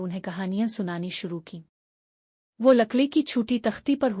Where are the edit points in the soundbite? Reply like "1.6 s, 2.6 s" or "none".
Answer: 1.2 s